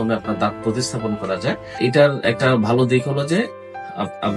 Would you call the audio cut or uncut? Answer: cut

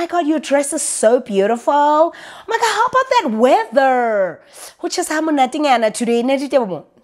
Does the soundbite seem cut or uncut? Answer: uncut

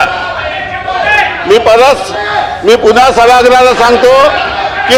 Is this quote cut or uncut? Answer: uncut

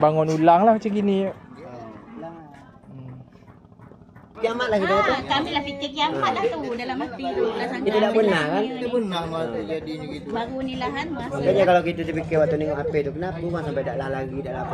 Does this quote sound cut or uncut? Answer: cut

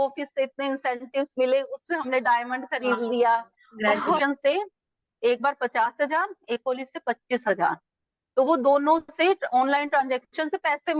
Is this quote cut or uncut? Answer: cut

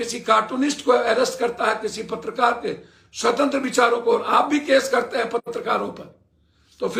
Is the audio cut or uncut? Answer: uncut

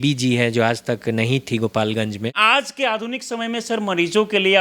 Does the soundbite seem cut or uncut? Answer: cut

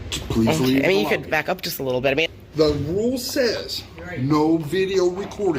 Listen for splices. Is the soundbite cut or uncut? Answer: cut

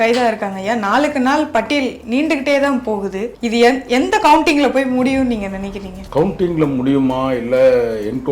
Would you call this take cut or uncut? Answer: cut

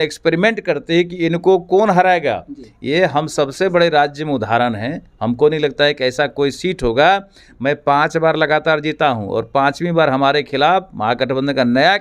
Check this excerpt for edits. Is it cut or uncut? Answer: uncut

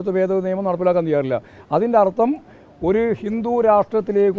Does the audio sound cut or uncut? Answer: uncut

